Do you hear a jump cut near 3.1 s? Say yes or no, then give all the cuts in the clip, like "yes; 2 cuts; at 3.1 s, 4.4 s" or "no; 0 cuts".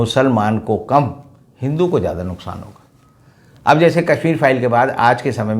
no; 0 cuts